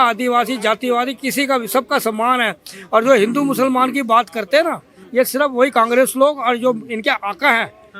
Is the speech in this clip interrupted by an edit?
no; 0 cuts

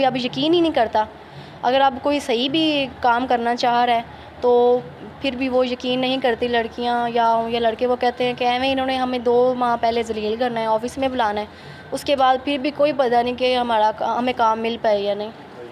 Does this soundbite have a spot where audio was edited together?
no; 0 cuts

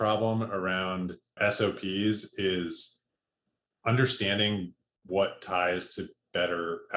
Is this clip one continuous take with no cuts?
no; 1 cut; at 1.3 s

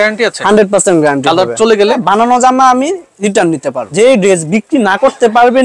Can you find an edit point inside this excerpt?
yes; 2 cuts; at 2.0 s, 3.8 s

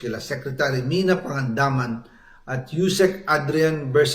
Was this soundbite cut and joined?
no; 0 cuts

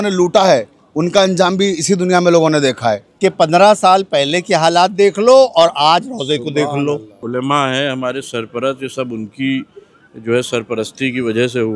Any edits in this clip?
yes; 2 cuts; at 3.1 s, 7.2 s

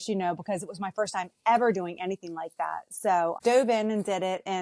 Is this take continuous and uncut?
no; 1 cut; at 3.4 s

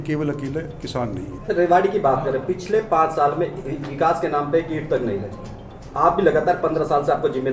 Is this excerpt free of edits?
no; 1 cut; at 1.3 s

